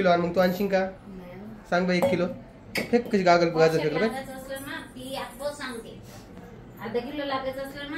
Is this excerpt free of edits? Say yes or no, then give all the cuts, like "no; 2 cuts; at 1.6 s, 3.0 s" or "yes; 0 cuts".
yes; 0 cuts